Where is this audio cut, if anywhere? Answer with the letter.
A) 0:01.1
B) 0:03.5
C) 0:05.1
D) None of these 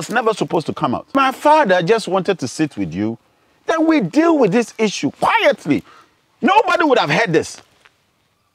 A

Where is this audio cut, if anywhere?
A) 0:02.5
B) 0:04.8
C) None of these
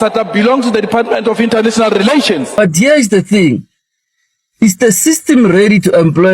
A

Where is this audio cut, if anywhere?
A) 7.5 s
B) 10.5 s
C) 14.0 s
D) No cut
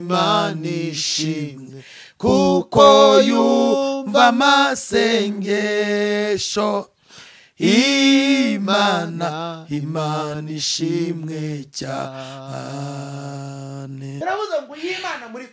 C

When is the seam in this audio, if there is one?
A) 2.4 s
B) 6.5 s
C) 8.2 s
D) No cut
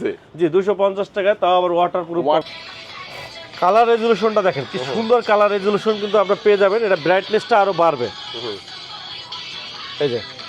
A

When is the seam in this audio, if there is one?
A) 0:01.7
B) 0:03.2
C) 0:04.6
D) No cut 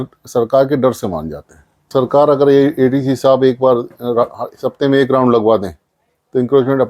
A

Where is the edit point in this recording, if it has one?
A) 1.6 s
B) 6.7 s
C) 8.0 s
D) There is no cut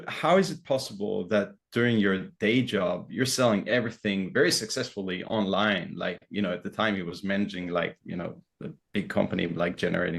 D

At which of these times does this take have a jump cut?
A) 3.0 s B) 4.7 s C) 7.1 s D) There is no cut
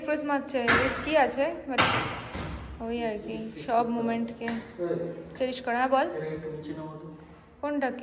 D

